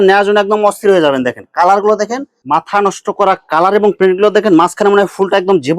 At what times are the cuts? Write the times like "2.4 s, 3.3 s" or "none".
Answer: 2.3 s